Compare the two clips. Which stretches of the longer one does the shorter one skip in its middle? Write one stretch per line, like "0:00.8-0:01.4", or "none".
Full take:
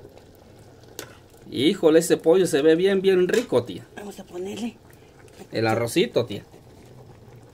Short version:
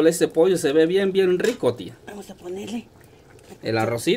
none

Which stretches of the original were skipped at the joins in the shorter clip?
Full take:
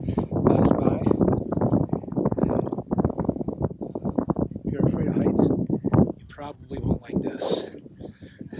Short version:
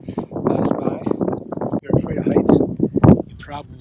0:01.8-0:04.7

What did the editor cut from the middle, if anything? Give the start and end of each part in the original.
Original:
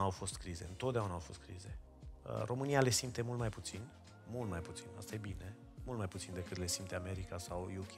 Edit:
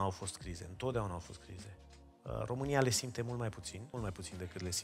0:03.8-0:05.7

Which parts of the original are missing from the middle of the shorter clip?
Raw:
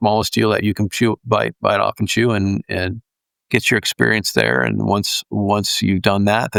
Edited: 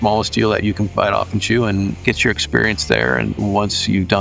0:00.9-0:01.6
0:02.6-0:03.4
0:04.8-0:05.3

